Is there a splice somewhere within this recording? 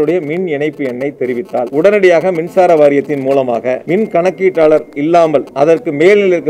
yes; 3 cuts; at 1.7 s, 3.8 s, 5.5 s

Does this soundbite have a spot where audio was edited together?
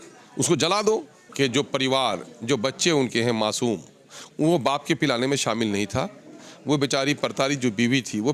yes; 1 cut; at 1.2 s

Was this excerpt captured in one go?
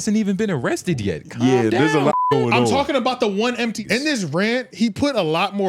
no; 1 cut; at 3.8 s

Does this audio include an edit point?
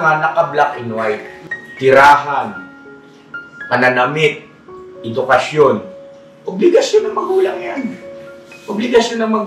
yes; 1 cut; at 1.4 s

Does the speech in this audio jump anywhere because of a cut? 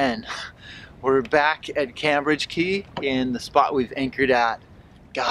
no; 0 cuts

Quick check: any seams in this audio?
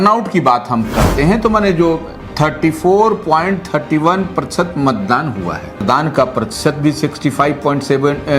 yes; 1 cut; at 5.8 s

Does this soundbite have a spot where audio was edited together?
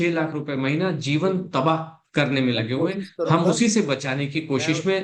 no; 0 cuts

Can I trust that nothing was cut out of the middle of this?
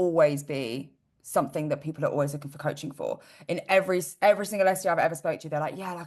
yes; 0 cuts

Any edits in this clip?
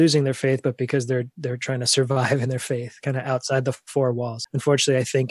yes; 1 cut; at 4.4 s

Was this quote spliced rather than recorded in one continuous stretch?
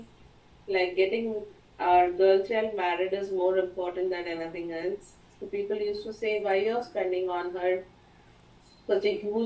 no; 0 cuts

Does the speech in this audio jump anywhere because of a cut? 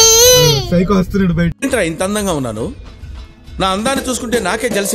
no; 0 cuts

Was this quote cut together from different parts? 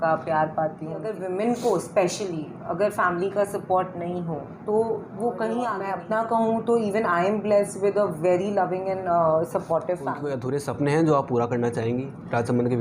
yes; 3 cuts; at 1.1 s, 5.8 s, 10.3 s

